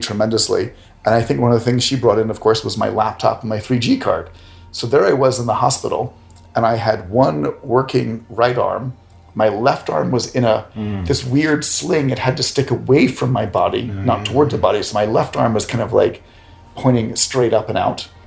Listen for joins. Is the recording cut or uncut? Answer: uncut